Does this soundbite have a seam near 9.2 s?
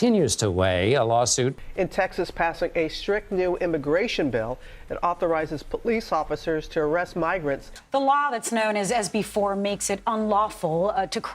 no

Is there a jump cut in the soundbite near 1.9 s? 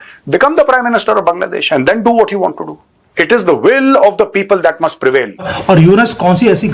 no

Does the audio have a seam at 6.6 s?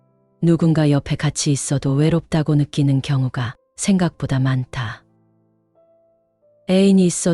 yes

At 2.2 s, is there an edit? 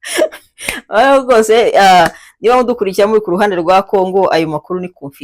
no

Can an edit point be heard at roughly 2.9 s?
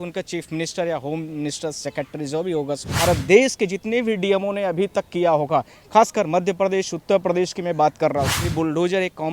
yes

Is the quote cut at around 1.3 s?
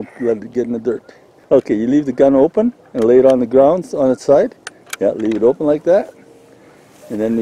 yes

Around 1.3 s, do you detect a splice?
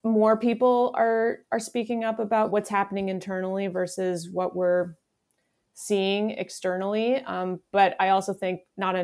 no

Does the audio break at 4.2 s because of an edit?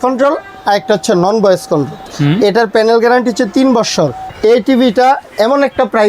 yes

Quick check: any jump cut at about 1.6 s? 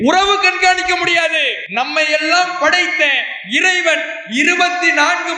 yes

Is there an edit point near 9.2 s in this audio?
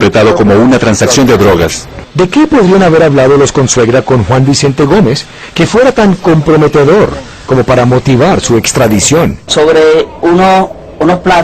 no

